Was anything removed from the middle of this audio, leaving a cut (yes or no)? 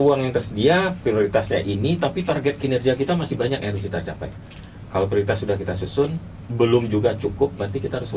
no